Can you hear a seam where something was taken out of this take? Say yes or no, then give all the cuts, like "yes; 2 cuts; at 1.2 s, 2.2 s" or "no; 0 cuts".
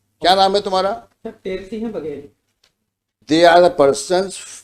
yes; 1 cut; at 3.2 s